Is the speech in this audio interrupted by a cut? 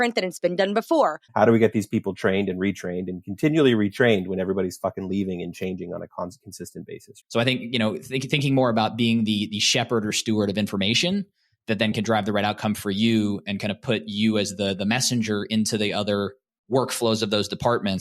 yes; 2 cuts; at 1.2 s, 7.0 s

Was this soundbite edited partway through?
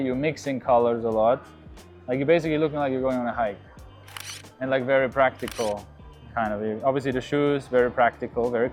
no; 0 cuts

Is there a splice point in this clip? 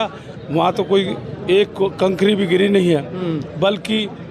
no; 0 cuts

